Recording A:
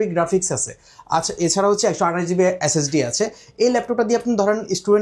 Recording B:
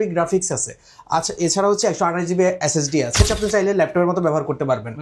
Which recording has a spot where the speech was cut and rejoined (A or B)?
B